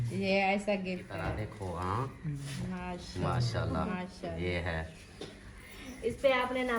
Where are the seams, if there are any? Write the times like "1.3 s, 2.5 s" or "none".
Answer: 1.3 s